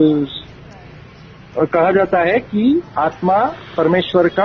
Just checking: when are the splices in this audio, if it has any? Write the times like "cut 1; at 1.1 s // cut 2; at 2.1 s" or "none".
none